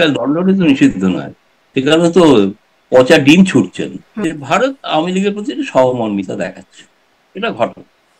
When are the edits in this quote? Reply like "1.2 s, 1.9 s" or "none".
4.2 s